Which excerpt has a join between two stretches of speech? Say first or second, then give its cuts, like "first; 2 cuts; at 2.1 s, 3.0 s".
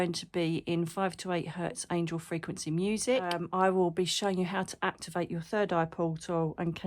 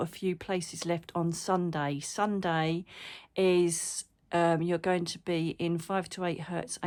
first; 1 cut; at 3.4 s